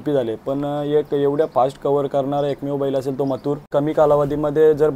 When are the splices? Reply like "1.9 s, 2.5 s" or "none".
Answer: 3.6 s